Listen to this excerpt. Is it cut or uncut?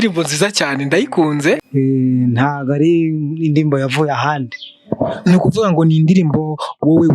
cut